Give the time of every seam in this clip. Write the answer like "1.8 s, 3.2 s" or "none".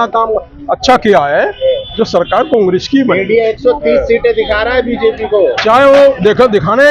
none

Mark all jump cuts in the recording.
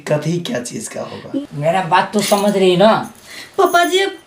1.5 s

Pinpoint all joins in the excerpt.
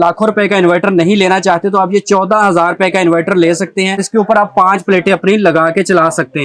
4.0 s

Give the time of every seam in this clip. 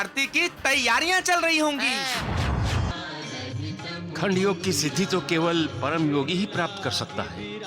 2.9 s

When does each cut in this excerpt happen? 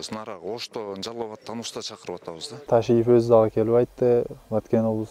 2.7 s

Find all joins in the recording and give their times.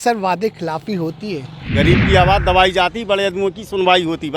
1.6 s

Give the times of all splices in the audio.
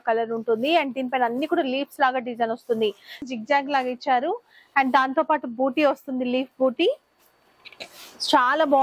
3.2 s

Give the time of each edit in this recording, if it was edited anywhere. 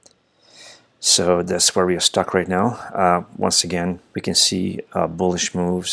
4.1 s

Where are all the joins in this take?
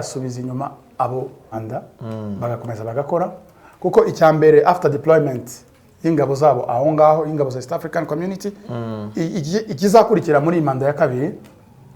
1.5 s

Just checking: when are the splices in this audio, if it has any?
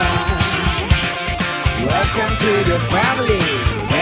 none

